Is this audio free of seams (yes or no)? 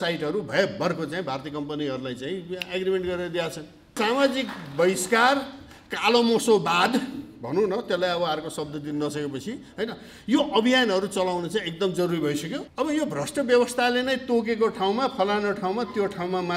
no